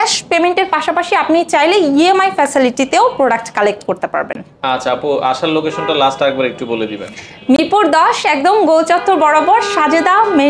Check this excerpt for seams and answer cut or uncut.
uncut